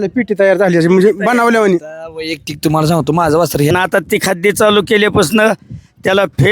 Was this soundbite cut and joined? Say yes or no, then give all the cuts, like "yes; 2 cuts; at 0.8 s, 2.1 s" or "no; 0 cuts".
yes; 1 cut; at 3.7 s